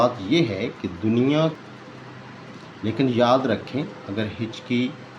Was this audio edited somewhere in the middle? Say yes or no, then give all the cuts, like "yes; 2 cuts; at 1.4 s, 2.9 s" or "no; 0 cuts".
yes; 1 cut; at 1.9 s